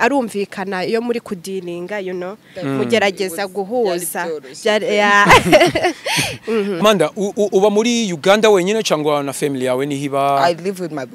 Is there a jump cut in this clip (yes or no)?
yes